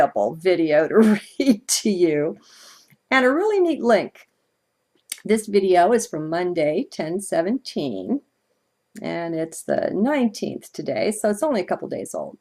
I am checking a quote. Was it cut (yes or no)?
yes